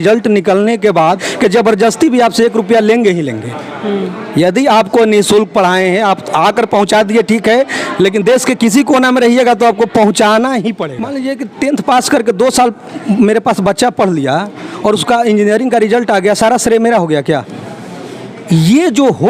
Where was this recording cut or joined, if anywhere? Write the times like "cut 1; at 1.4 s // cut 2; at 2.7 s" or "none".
cut 1; at 1.2 s // cut 2; at 11.1 s

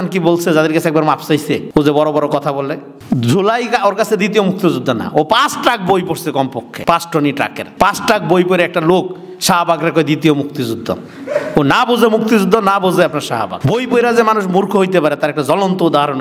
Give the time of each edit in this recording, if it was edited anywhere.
cut 1; at 1.6 s // cut 2; at 2.9 s // cut 3; at 6.7 s // cut 4; at 7.6 s // cut 5; at 13.5 s

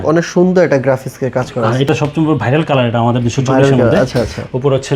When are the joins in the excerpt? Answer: cut 1; at 1.9 s

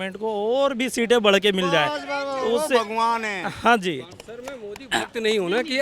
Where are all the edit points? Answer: cut 1; at 4.1 s

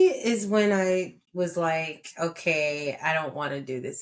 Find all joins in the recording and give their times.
none

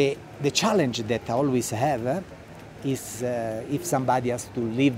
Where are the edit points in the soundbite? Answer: none

